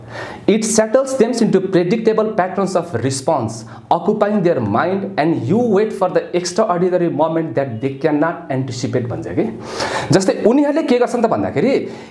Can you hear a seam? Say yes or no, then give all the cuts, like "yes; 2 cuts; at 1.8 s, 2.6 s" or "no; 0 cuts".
no; 0 cuts